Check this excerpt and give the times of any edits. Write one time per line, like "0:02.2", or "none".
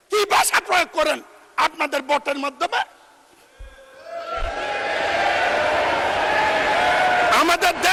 none